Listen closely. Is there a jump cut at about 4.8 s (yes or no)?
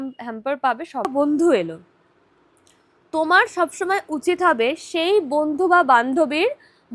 no